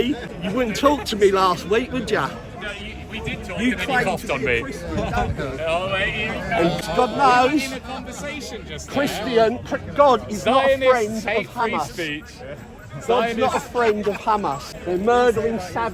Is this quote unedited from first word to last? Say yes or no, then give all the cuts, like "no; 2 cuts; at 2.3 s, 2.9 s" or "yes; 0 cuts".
yes; 0 cuts